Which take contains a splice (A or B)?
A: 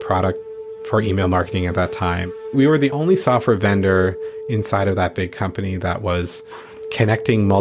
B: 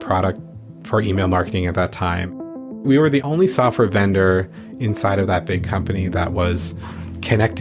A